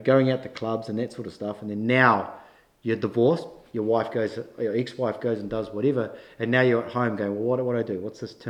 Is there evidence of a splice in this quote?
no; 0 cuts

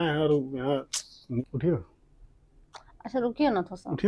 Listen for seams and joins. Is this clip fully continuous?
no; 1 cut; at 1.4 s

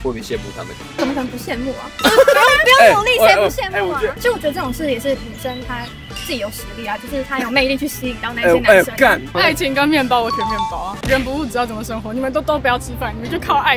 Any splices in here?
yes; 3 cuts; at 4.1 s, 9.3 s, 10.9 s

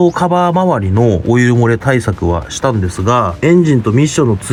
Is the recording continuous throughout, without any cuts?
yes; 0 cuts

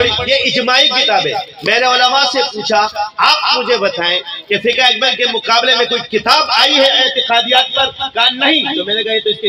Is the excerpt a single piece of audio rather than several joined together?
yes; 0 cuts

